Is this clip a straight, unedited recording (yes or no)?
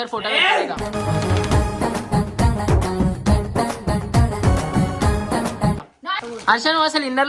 no